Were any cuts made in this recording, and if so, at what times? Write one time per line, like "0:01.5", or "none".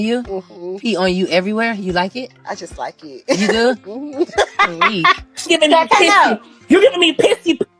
0:05.4